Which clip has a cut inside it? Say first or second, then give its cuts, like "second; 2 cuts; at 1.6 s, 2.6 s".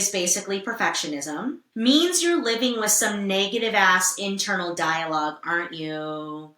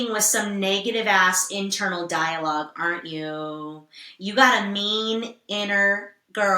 first; 1 cut; at 1.6 s